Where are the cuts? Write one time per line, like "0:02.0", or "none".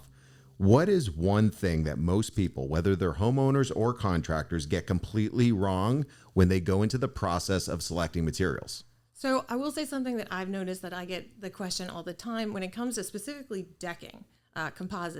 none

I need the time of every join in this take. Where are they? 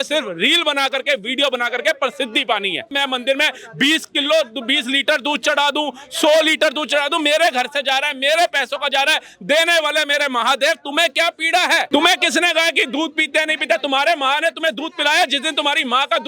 0:02.9
0:11.9

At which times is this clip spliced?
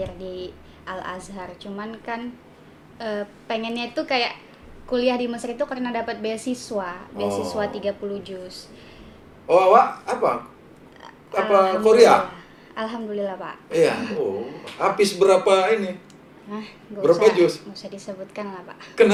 none

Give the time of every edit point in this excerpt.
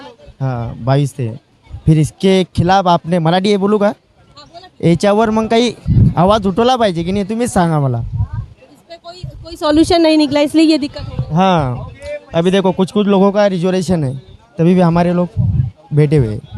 none

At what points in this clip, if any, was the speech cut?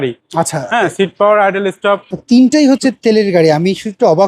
0:02.1

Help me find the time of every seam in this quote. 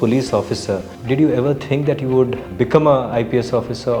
0:00.9
0:02.4

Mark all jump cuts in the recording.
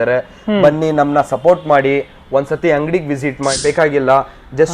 0:03.6

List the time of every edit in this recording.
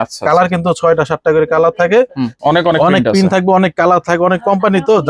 0:02.3

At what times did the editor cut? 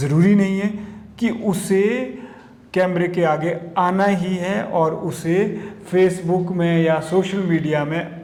none

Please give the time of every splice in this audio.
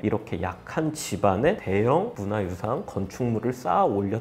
none

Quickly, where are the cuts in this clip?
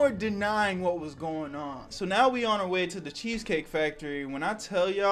0:01.8

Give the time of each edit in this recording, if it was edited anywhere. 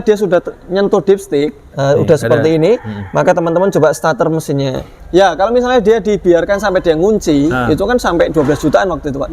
0:01.7
0:04.9

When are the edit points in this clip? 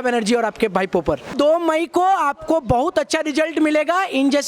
0:01.3

